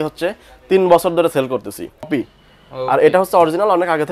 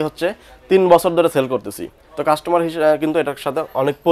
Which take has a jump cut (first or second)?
first